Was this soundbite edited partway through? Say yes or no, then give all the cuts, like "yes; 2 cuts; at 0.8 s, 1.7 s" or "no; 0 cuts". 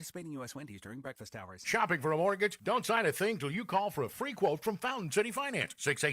yes; 1 cut; at 1.6 s